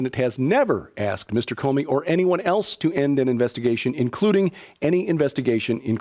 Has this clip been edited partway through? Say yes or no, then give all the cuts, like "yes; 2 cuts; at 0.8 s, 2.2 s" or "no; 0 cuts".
yes; 1 cut; at 4.0 s